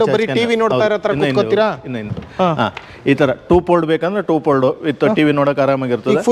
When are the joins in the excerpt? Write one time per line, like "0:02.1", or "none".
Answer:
none